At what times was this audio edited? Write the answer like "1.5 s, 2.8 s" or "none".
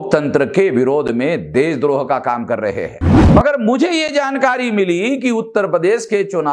3.3 s